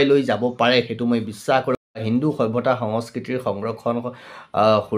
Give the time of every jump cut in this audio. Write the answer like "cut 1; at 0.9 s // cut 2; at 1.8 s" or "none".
cut 1; at 2.0 s